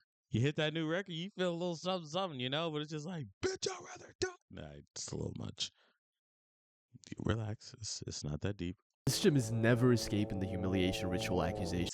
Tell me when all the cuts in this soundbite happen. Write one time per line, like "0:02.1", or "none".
0:09.1